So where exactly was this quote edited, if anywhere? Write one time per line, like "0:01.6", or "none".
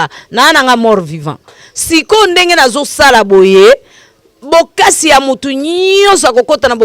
none

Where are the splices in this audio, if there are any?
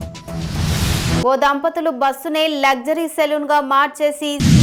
none

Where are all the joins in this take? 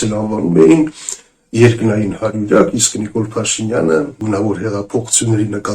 0:04.1

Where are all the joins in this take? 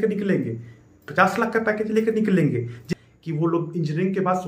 0:02.8

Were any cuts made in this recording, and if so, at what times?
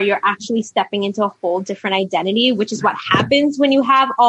none

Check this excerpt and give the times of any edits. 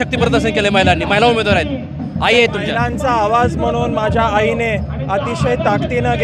none

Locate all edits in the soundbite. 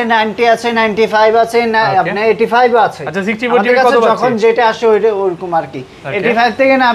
none

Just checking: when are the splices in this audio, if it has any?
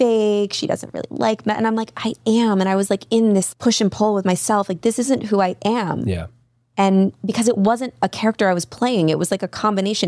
0:03.5

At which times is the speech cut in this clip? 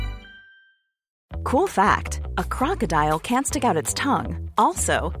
0:01.2

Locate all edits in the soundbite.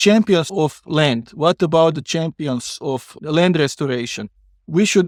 none

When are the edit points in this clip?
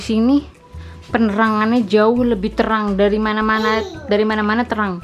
none

